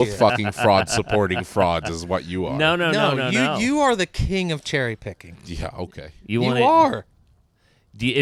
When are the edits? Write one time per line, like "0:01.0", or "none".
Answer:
none